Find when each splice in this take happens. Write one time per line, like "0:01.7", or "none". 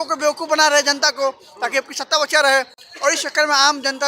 none